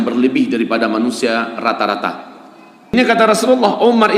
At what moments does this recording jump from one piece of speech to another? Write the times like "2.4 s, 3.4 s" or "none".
2.9 s